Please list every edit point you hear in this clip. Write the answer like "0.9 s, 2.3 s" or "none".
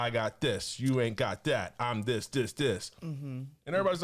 none